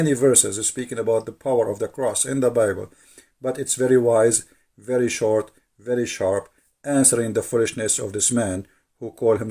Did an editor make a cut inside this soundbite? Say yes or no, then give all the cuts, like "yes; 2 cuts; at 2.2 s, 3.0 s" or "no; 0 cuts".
no; 0 cuts